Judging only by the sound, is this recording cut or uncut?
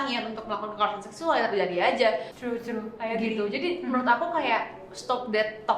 cut